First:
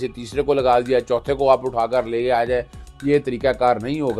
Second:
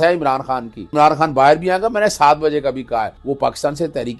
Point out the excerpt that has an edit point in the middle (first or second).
second